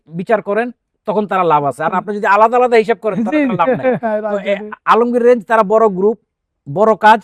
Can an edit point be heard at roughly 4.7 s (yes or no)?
no